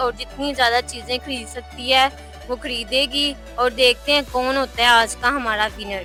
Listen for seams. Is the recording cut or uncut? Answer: uncut